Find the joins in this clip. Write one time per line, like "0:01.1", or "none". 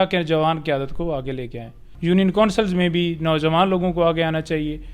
0:01.9